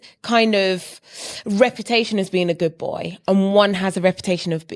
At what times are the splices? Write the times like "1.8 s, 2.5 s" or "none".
none